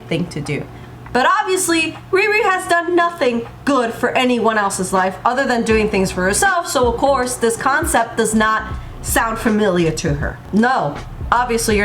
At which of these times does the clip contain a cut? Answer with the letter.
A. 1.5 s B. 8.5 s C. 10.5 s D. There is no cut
C